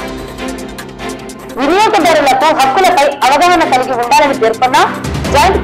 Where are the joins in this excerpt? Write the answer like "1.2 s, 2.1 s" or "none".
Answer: 1.0 s

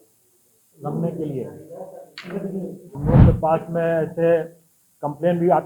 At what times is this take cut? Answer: 3.0 s

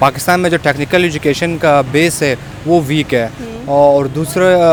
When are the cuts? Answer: none

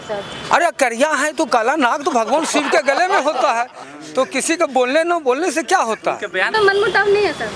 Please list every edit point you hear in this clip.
6.5 s

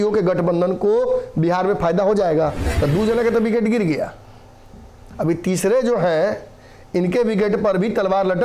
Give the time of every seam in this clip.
2.6 s

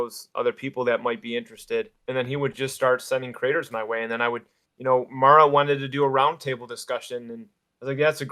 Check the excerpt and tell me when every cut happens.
2.0 s

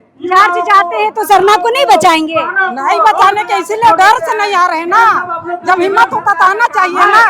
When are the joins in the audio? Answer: none

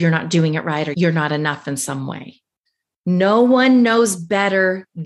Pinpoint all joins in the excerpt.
0.9 s

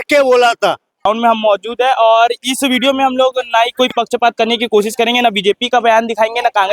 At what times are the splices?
1.1 s

